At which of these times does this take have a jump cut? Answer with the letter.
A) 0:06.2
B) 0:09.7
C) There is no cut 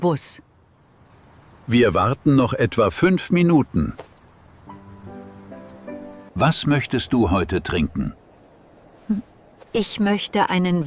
A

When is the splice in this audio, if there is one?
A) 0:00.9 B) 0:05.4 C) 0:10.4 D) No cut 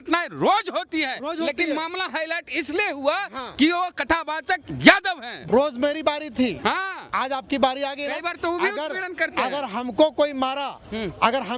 B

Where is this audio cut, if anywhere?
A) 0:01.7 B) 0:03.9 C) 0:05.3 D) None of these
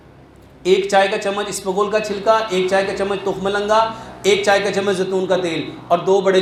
D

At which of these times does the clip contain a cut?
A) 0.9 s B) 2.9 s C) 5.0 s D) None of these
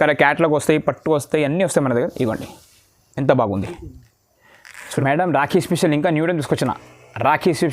C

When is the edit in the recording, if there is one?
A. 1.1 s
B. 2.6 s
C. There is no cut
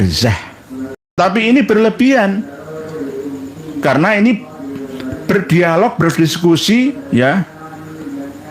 A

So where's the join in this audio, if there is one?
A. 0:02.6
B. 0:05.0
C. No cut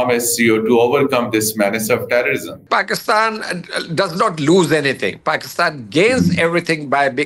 A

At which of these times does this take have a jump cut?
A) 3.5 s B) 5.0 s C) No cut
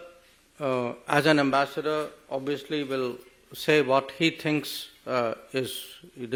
C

